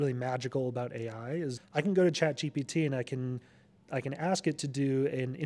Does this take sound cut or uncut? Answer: cut